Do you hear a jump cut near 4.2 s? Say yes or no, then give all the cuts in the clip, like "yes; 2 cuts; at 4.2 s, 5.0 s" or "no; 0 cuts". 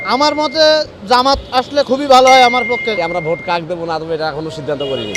no; 1 cut; at 3.0 s